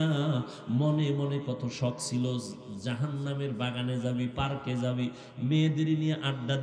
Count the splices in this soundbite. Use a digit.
0